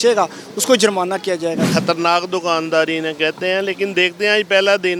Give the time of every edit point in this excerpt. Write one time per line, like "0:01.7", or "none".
0:01.7